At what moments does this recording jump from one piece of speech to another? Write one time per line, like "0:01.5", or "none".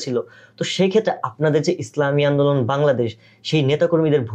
none